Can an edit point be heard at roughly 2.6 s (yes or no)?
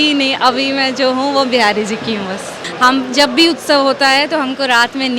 yes